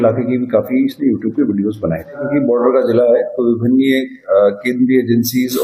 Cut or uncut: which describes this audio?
cut